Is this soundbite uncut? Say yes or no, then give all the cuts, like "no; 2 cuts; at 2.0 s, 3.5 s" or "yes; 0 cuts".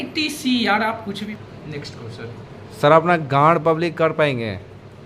no; 1 cut; at 1.1 s